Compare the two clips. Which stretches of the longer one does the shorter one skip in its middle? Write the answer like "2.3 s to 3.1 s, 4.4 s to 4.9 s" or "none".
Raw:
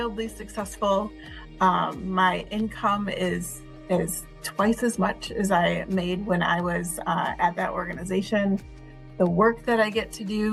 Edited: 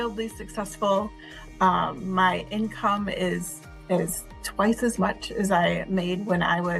none